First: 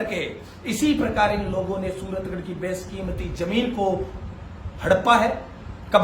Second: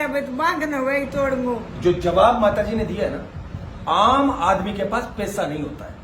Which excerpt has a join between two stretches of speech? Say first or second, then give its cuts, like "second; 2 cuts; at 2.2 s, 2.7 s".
second; 1 cut; at 1.7 s